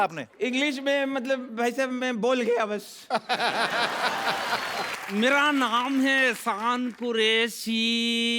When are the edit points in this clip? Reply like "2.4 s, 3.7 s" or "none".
5.0 s